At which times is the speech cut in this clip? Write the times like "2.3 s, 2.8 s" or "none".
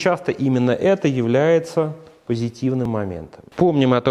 2.8 s